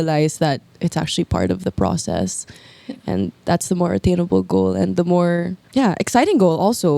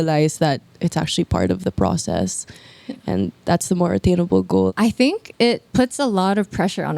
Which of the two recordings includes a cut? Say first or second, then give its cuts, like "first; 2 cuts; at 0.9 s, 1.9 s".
second; 1 cut; at 4.7 s